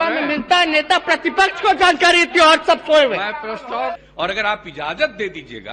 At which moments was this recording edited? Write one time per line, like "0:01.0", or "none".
0:04.0